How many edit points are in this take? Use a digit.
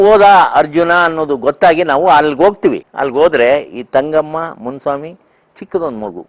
1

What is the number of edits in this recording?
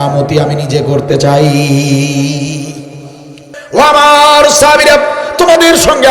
1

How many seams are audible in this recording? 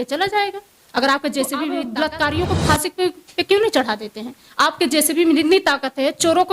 1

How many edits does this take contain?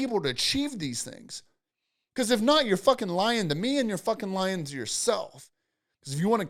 0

